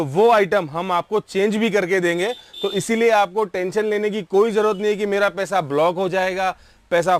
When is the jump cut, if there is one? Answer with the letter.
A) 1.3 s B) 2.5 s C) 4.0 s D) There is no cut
D